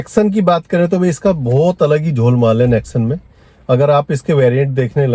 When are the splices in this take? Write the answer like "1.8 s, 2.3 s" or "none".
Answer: none